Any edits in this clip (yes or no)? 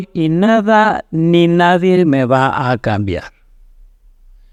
no